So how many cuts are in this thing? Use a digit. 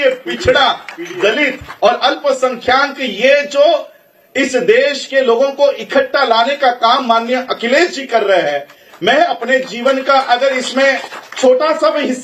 0